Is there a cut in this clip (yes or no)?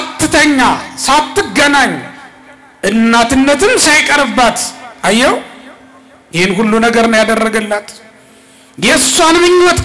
no